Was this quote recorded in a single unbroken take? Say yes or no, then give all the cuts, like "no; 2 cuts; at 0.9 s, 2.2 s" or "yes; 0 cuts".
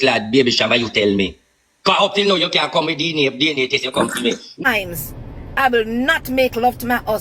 no; 1 cut; at 4.5 s